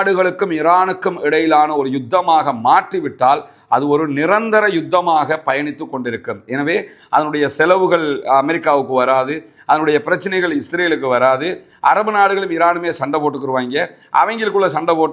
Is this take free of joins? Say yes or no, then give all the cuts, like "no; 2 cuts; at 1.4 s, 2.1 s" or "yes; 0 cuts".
yes; 0 cuts